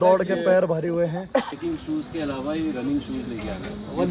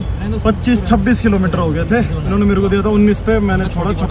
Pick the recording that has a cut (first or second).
first